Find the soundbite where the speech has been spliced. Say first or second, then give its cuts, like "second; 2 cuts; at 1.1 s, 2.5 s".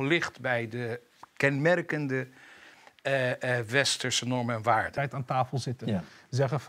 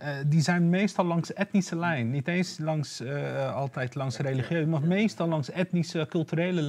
first; 1 cut; at 4.9 s